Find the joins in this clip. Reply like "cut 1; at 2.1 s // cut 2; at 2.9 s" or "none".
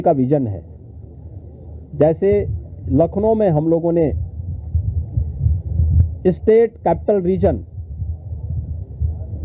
none